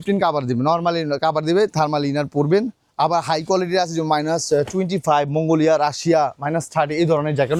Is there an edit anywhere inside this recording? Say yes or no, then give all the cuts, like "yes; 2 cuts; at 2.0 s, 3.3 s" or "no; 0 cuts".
no; 0 cuts